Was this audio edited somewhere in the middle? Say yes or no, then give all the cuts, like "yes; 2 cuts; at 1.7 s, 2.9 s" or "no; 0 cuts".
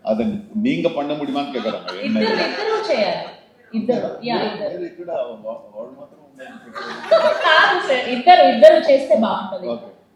no; 0 cuts